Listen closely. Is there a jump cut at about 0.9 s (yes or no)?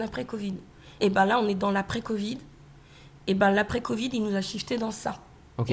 yes